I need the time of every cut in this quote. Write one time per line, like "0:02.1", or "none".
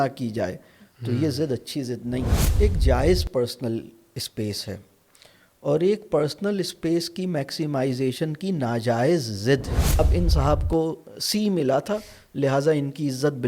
0:02.5
0:10.0